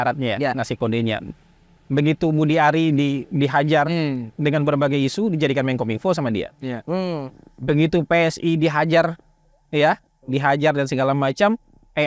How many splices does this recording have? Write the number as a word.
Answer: zero